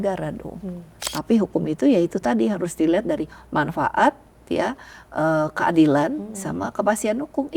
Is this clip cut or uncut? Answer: cut